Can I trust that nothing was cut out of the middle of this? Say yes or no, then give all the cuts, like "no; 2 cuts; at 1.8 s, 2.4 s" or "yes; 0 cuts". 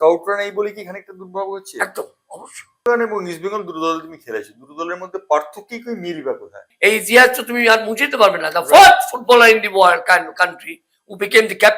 no; 2 cuts; at 2.9 s, 6.6 s